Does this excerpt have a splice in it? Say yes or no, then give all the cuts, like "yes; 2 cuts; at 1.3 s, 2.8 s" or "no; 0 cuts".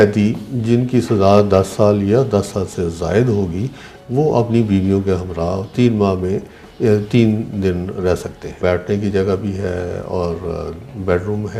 yes; 2 cuts; at 5.7 s, 8.5 s